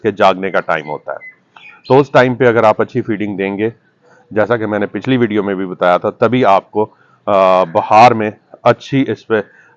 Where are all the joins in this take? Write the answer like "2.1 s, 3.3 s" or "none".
none